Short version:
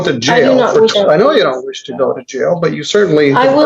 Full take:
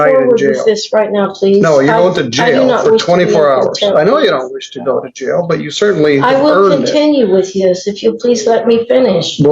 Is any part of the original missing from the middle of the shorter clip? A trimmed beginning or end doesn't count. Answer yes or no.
yes